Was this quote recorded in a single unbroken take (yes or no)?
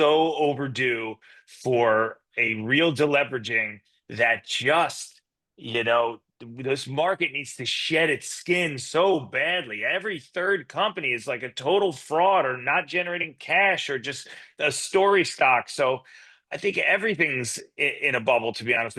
yes